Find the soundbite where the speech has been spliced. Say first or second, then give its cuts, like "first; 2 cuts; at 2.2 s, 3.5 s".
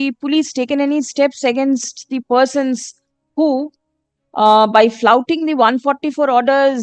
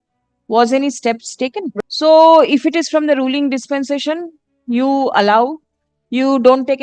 second; 1 cut; at 1.7 s